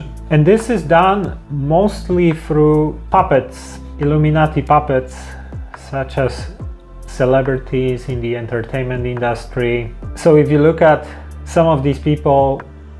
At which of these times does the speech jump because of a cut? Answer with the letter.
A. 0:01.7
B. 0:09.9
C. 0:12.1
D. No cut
B